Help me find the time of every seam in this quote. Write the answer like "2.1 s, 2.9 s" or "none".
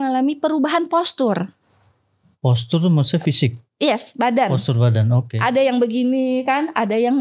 none